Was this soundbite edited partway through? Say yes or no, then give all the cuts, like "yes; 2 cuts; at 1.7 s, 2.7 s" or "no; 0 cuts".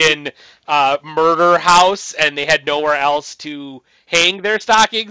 no; 0 cuts